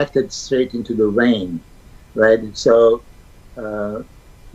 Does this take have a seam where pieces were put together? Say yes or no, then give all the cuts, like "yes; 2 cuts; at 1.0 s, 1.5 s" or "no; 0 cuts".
no; 0 cuts